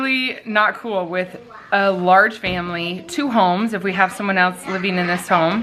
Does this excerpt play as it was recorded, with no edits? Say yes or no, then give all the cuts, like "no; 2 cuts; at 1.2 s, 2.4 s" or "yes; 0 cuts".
yes; 0 cuts